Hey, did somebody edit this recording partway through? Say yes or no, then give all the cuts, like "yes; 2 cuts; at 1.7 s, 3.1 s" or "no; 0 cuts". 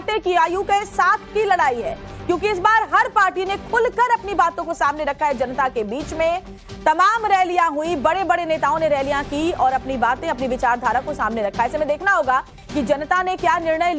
no; 0 cuts